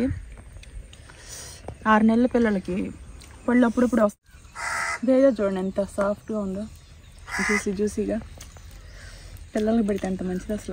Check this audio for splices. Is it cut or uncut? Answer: cut